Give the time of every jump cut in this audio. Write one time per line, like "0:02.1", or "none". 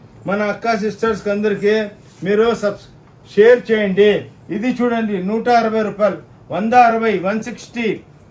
none